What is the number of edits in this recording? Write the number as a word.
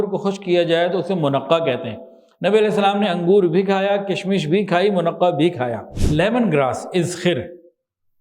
one